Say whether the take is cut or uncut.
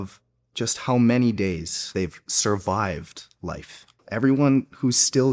cut